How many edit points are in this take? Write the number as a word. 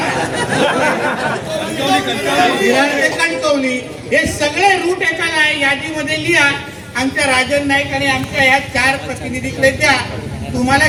zero